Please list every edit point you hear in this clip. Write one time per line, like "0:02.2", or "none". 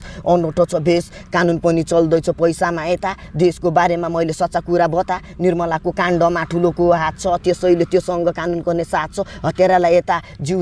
none